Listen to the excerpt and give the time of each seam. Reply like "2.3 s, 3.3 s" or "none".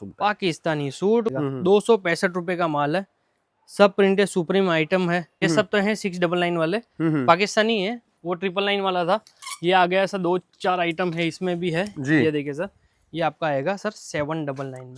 1.3 s, 5.4 s